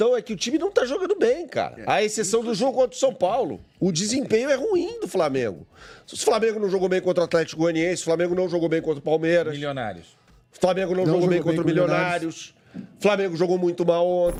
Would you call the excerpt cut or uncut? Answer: uncut